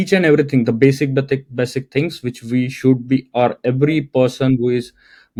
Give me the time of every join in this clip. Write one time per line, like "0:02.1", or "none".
none